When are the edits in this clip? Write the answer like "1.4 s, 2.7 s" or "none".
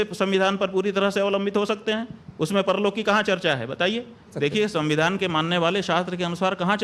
4.3 s